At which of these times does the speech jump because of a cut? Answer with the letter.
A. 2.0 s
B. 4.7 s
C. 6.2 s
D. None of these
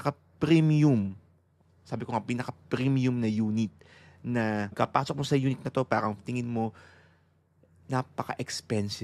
B